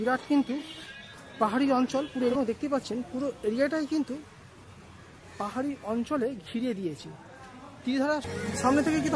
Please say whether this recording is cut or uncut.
cut